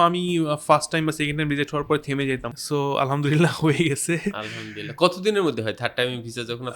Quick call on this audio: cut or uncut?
cut